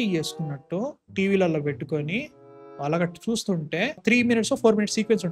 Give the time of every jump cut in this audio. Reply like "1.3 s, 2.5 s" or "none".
4.0 s